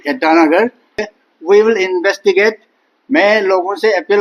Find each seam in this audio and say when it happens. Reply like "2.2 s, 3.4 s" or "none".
1.1 s